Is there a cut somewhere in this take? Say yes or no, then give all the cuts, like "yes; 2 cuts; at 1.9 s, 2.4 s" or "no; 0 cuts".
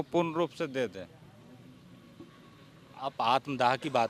no; 0 cuts